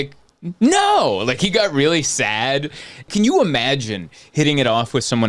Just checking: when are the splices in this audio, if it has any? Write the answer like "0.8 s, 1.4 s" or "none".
3.1 s